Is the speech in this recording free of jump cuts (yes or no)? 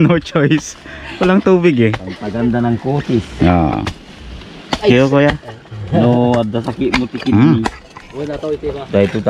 no